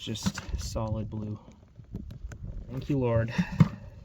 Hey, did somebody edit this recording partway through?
yes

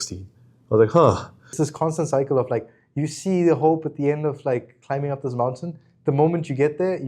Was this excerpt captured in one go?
no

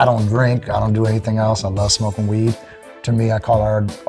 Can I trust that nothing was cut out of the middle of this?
yes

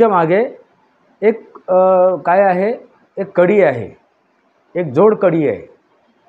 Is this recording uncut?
yes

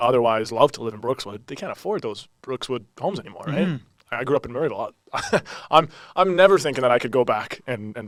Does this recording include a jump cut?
no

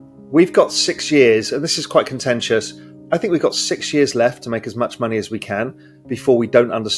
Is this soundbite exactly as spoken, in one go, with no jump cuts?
yes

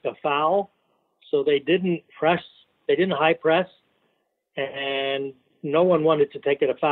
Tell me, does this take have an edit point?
no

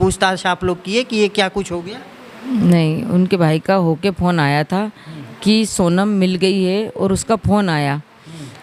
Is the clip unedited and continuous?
yes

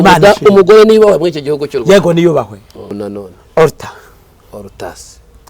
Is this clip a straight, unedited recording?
no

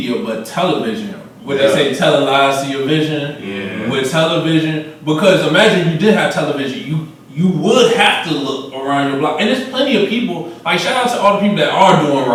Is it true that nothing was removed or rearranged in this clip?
yes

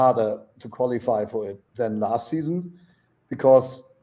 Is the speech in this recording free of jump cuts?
no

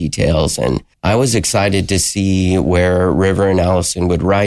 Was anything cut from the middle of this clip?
yes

